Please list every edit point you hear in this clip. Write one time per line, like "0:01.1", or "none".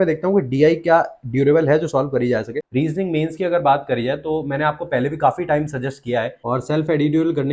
0:02.6
0:06.4